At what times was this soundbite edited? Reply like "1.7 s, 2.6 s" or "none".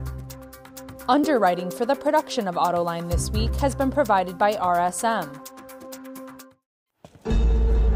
1.0 s, 5.3 s, 6.4 s